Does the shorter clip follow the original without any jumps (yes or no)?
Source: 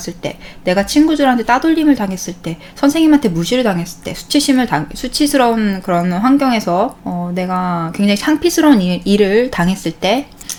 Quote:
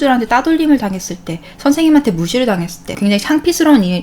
no